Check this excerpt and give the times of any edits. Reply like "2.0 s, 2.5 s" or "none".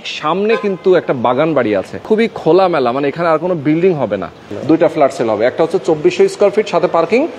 1.9 s, 4.5 s